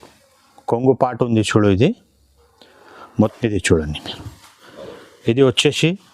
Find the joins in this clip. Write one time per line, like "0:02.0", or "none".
0:03.3

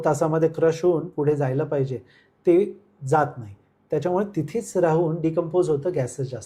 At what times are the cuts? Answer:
none

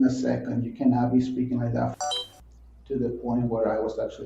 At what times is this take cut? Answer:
0:02.0

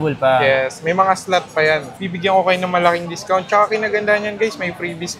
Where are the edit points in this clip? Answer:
0:02.0

